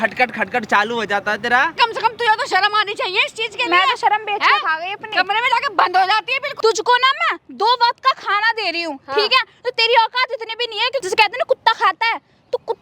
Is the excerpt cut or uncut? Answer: cut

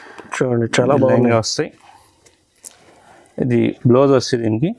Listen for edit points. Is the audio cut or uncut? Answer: uncut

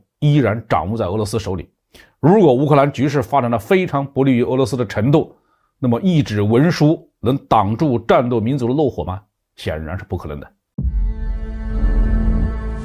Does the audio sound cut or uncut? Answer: cut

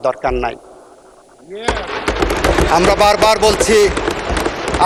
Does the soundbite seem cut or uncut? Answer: uncut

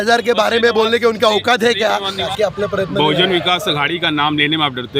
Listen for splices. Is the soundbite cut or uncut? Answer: cut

